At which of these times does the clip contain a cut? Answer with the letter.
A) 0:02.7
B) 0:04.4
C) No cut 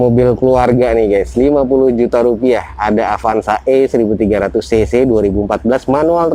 C